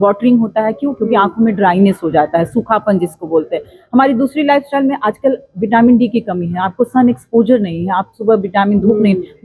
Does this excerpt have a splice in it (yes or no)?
no